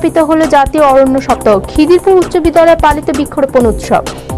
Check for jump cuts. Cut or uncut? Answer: uncut